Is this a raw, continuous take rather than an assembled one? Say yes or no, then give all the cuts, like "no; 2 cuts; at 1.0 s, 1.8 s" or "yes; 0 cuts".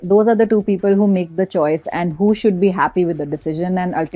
yes; 0 cuts